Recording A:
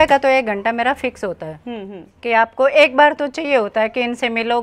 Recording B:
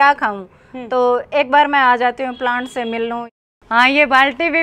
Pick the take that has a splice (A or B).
B